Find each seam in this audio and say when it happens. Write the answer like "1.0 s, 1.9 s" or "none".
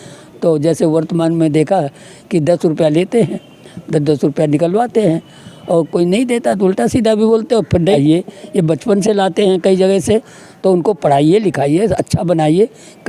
8.0 s